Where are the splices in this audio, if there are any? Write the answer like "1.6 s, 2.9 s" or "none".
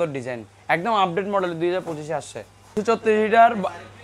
2.8 s